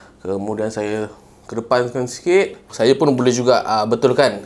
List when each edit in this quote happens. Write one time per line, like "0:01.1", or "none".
0:02.7